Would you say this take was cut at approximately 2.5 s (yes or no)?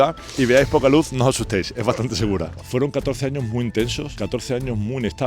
yes